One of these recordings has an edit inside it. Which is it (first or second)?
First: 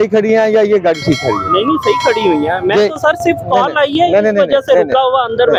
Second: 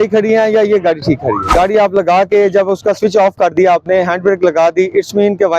second